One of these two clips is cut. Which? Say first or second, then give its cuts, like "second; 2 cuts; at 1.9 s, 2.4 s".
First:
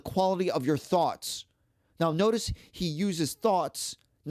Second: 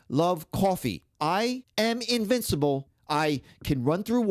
second; 2 cuts; at 1.4 s, 2.9 s